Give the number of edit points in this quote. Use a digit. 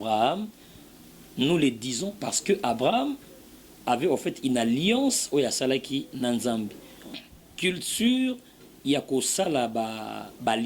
1